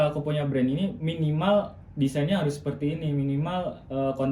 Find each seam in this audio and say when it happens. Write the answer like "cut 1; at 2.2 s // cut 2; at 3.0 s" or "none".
none